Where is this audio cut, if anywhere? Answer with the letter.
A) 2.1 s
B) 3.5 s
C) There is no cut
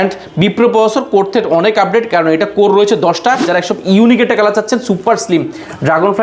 B